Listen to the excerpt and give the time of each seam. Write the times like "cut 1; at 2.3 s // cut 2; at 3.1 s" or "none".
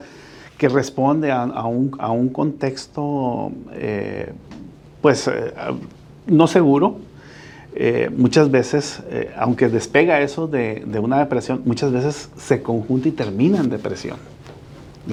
none